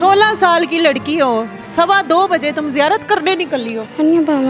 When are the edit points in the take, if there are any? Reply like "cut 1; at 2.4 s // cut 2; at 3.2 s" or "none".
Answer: none